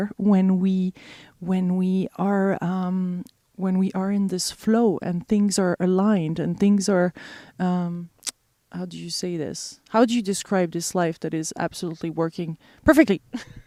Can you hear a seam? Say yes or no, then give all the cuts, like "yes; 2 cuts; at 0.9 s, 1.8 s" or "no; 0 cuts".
no; 0 cuts